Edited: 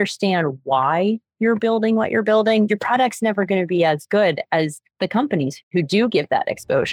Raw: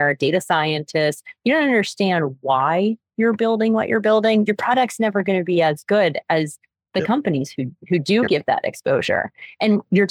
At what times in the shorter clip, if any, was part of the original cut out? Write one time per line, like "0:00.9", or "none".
0:04.8
0:05.6